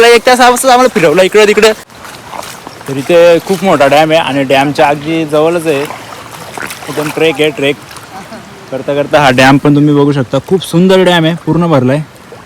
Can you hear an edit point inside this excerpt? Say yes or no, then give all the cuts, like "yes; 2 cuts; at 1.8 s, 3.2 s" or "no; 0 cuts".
yes; 1 cut; at 1.9 s